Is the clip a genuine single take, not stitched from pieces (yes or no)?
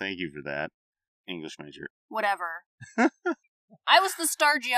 no